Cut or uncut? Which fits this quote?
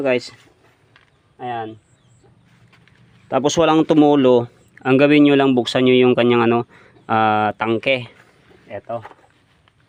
uncut